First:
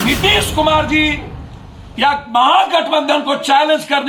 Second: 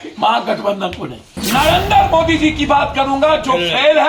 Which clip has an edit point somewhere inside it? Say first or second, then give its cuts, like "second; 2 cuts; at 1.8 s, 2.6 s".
second; 1 cut; at 1.3 s